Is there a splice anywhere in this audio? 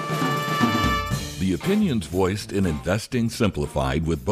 yes; 1 cut; at 1.2 s

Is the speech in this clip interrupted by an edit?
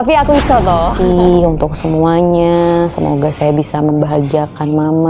yes; 1 cut; at 0.9 s

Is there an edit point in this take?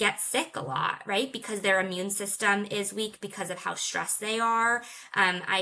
no; 0 cuts

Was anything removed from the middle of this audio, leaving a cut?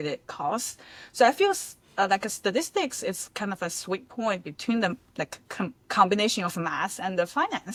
no; 0 cuts

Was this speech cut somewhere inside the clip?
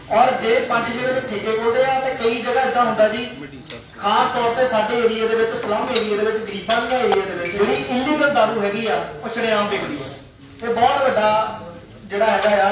yes; 1 cut; at 7.5 s

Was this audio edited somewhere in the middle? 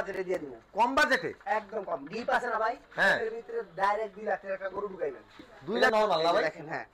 yes; 1 cut; at 5.9 s

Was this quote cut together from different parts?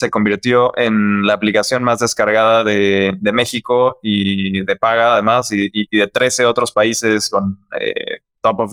no; 0 cuts

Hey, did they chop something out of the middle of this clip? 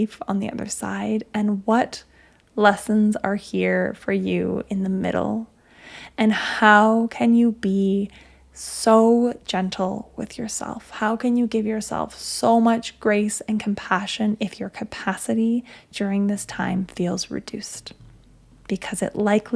no; 0 cuts

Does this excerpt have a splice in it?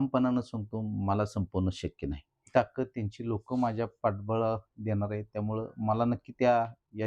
yes; 1 cut; at 2.4 s

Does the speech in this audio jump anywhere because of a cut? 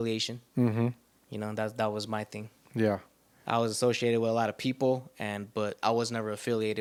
no; 0 cuts

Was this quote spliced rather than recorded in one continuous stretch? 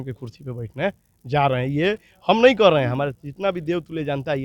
no; 0 cuts

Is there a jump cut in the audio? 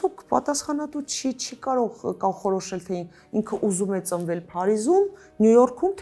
no; 0 cuts

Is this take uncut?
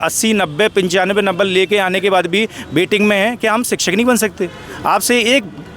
yes; 0 cuts

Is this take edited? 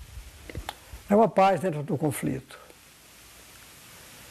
no; 0 cuts

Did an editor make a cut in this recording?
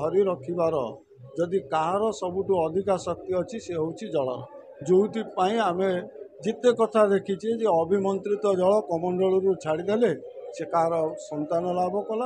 no; 0 cuts

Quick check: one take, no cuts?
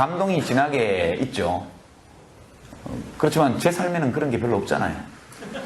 no; 1 cut; at 4.6 s

